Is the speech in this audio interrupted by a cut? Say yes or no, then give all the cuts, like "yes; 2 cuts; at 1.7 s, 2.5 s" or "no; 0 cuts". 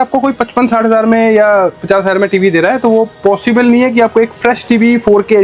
no; 0 cuts